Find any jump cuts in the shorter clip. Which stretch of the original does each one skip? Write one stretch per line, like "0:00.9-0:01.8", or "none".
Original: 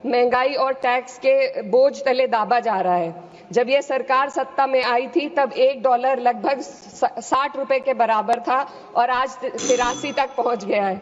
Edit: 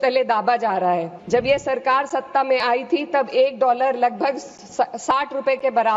0:03.2-0:03.4

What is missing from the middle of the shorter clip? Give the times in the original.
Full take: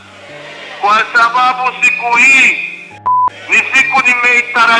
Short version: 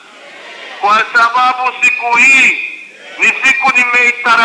0:03.0-0:03.3

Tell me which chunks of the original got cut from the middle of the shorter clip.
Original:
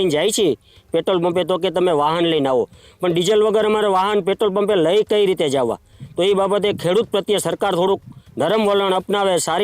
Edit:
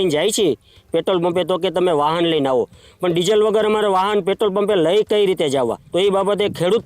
0:05.8-0:06.1

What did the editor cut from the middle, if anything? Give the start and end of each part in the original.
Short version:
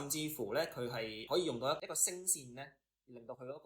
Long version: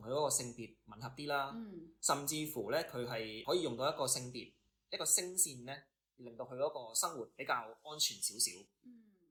0:04.0-0:04.9

